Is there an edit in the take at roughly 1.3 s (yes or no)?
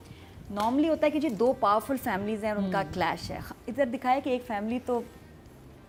no